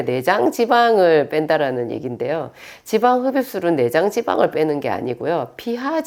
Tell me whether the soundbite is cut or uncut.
uncut